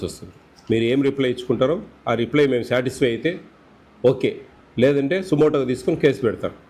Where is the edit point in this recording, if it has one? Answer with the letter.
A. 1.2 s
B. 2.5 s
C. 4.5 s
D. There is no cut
D